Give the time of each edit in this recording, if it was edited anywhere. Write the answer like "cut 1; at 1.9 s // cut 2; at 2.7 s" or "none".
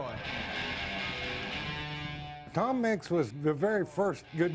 cut 1; at 2.3 s // cut 2; at 3.3 s